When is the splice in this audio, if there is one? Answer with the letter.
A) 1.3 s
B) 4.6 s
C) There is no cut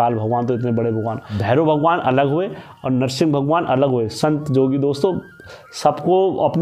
A